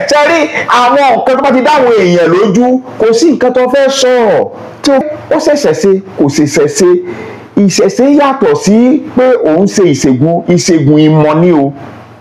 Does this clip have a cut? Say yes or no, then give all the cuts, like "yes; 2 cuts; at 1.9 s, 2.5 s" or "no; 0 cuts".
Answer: yes; 1 cut; at 5.1 s